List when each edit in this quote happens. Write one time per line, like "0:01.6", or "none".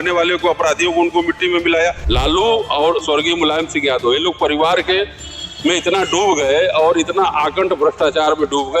0:02.0